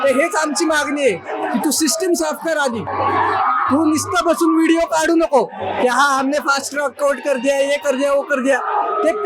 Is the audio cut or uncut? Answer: uncut